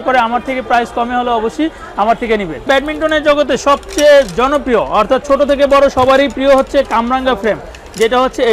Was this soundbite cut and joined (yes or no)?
yes